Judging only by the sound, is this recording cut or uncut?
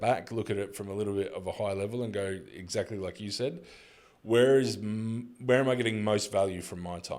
uncut